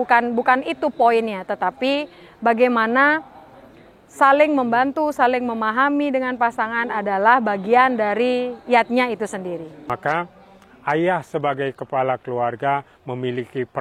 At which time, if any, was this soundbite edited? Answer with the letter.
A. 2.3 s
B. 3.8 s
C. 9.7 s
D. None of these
C